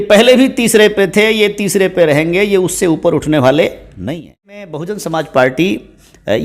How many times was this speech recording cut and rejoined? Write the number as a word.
one